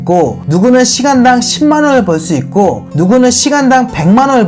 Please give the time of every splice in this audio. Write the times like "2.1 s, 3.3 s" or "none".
none